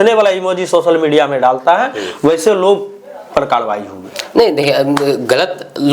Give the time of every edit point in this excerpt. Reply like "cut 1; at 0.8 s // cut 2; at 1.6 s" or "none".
none